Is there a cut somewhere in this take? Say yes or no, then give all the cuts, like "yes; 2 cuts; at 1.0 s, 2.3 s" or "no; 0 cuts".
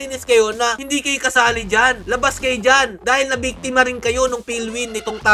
no; 0 cuts